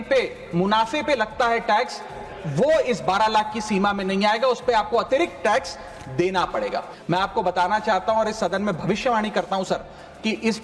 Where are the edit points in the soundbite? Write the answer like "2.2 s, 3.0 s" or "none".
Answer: 6.9 s